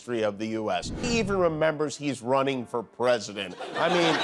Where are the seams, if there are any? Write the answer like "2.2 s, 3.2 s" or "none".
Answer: 0.9 s